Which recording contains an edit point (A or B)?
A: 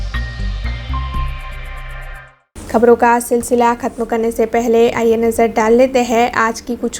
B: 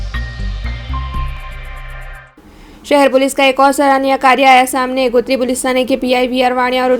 B